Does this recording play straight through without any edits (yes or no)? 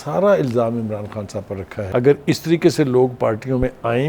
no